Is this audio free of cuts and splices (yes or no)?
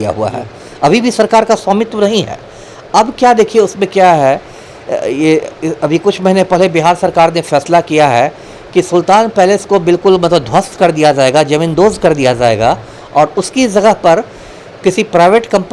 yes